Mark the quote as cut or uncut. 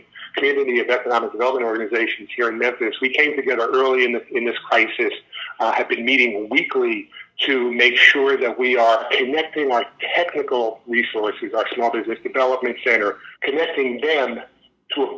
cut